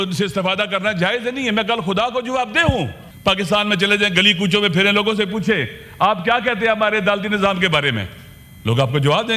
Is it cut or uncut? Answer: cut